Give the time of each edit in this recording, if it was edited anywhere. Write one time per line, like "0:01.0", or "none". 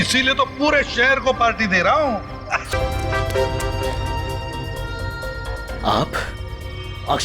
0:02.7